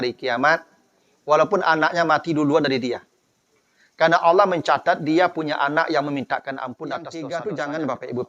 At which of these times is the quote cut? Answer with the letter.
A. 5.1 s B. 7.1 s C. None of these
B